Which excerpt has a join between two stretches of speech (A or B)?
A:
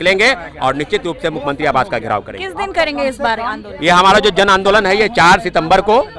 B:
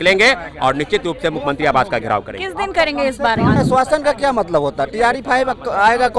B